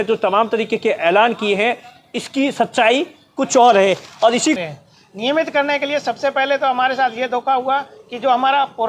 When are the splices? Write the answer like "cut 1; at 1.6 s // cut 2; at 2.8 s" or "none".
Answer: cut 1; at 4.6 s